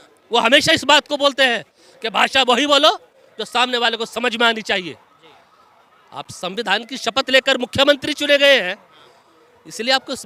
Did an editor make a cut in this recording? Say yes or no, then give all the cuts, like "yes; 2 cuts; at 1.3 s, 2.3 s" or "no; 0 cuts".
no; 0 cuts